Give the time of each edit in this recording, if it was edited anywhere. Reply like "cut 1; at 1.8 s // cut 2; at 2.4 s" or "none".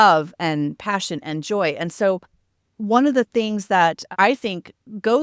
cut 1; at 4.0 s